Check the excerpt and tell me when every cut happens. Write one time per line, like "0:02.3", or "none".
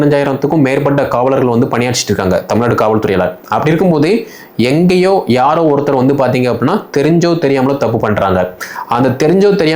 none